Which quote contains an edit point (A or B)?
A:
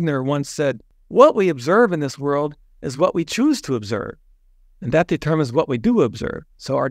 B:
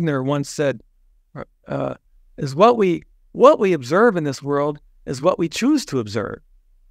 A